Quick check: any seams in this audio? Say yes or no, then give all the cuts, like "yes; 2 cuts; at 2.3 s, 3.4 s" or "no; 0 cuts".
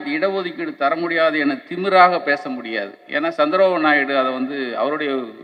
no; 0 cuts